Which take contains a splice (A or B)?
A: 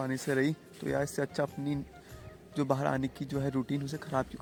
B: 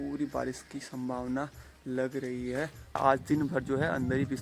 B